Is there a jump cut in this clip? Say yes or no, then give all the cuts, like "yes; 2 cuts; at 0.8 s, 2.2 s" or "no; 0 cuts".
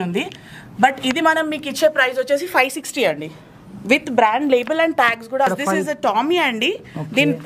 yes; 1 cut; at 5.5 s